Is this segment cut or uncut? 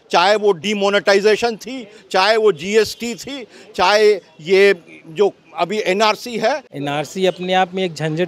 cut